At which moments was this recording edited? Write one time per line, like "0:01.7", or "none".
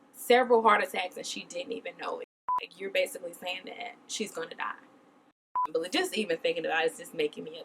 0:02.7
0:05.6